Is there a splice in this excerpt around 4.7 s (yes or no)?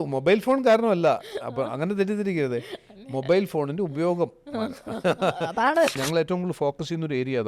no